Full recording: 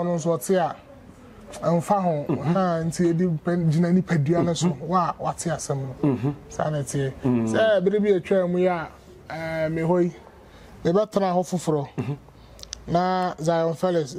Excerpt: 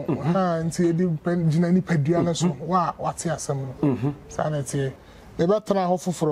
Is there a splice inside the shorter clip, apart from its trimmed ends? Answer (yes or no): yes